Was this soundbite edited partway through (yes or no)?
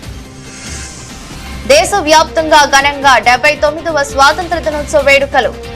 no